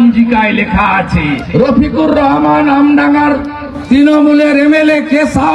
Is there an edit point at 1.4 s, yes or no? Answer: yes